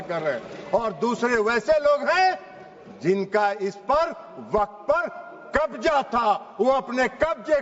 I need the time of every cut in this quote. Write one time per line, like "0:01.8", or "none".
none